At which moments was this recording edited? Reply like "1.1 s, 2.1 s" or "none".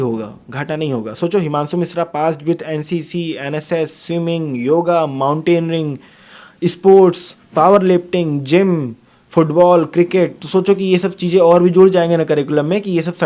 none

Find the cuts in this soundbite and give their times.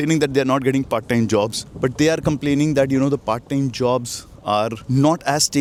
none

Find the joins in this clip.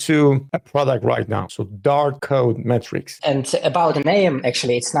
none

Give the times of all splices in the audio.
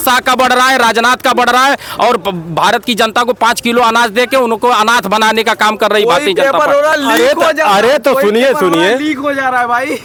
none

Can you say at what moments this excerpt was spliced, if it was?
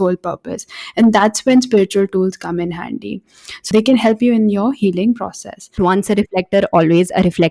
3.6 s, 5.8 s

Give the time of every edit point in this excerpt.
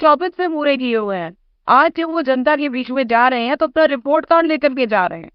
none

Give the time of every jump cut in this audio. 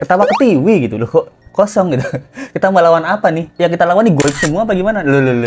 3.5 s

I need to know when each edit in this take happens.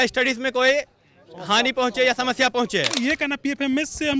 3.0 s

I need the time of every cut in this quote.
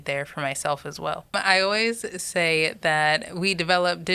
1.3 s

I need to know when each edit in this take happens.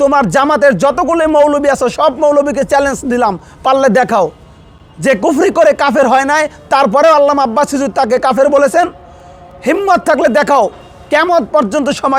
none

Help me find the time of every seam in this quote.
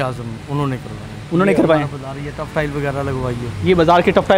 none

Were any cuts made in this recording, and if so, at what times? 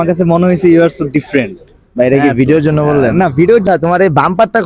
3.6 s

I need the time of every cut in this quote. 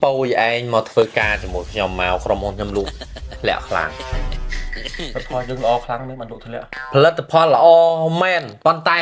none

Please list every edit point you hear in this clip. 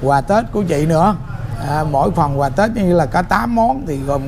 none

